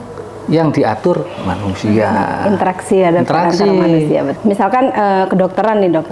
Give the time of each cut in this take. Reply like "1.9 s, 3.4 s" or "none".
4.4 s

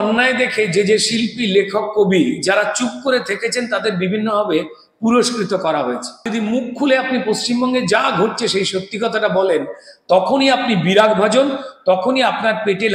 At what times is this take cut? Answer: 6.3 s

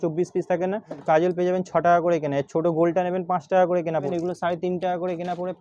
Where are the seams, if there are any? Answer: 1.0 s, 4.1 s

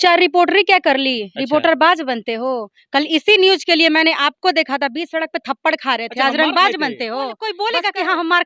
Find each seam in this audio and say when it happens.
7.4 s

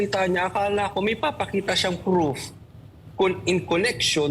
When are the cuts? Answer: none

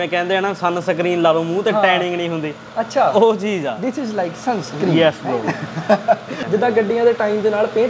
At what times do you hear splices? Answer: 6.3 s

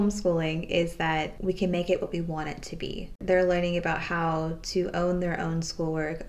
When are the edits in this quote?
3.2 s

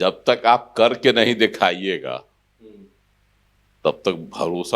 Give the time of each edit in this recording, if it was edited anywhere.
none

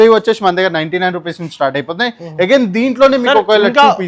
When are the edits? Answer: none

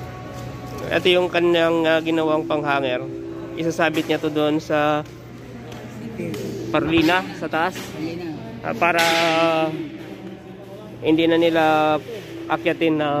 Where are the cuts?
none

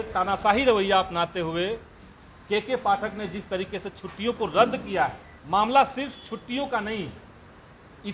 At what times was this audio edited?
5.3 s

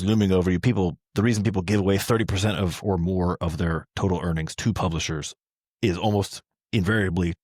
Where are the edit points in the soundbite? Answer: none

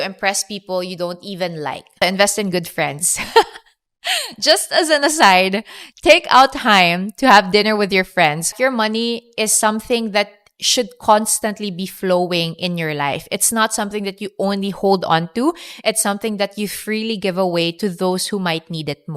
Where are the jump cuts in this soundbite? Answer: 2.0 s, 8.5 s

